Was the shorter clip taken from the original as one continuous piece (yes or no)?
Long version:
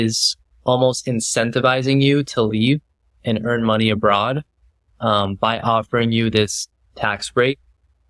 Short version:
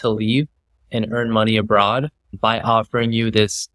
no